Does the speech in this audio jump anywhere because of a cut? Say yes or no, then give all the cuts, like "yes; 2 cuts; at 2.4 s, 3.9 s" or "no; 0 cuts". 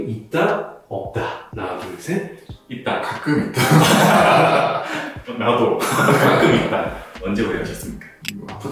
no; 0 cuts